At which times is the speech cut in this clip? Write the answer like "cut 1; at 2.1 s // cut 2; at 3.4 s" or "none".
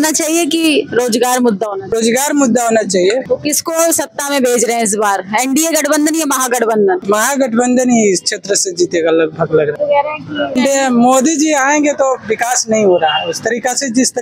cut 1; at 1.8 s // cut 2; at 3.2 s // cut 3; at 7.0 s // cut 4; at 10.3 s